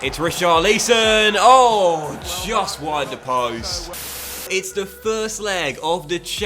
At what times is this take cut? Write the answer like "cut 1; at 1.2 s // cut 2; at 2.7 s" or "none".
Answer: cut 1; at 4.5 s